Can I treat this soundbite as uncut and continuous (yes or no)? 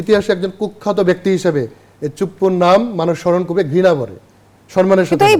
yes